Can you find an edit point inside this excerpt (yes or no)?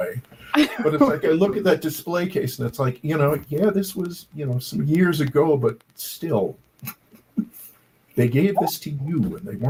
no